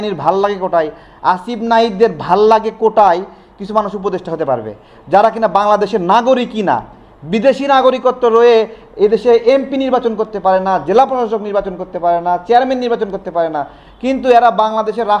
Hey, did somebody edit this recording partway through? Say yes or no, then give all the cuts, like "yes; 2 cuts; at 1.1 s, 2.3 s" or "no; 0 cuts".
no; 0 cuts